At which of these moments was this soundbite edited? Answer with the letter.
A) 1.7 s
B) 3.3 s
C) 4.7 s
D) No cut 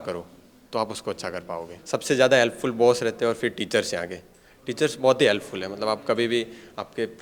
A